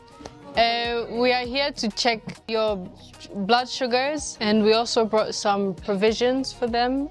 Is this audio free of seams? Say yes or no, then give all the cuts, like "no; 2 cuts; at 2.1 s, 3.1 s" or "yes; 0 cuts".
no; 2 cuts; at 2.5 s, 4.3 s